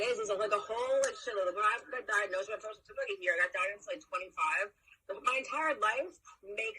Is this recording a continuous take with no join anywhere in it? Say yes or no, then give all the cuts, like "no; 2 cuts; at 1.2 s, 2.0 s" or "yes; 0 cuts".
no; 1 cut; at 2.4 s